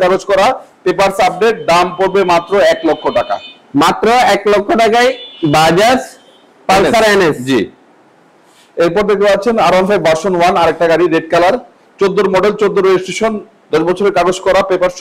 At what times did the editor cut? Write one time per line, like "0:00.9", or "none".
none